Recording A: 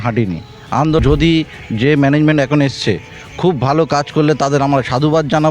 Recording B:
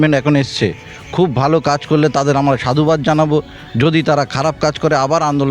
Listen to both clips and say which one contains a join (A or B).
A